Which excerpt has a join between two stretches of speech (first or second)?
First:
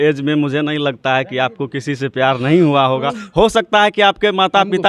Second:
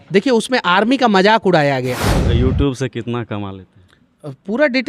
second